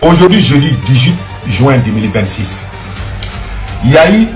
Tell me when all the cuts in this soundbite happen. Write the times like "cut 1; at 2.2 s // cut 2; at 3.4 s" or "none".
none